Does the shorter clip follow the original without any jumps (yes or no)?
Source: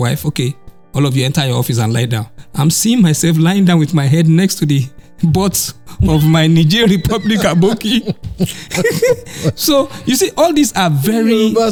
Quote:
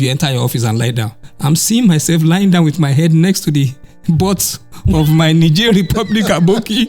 yes